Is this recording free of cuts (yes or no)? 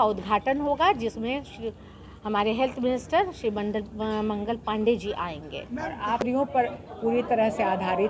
no